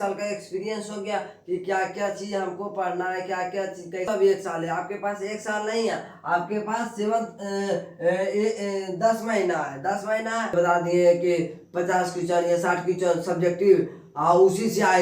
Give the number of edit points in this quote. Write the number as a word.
two